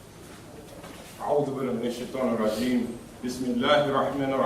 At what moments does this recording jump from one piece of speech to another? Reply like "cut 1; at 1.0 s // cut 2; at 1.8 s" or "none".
cut 1; at 3.5 s